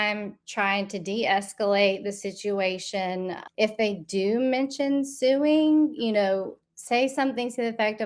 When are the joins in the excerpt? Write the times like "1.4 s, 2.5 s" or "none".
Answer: 3.4 s